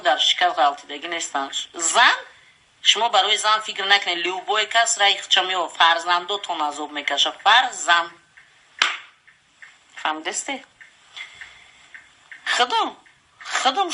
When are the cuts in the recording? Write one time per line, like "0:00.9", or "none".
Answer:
none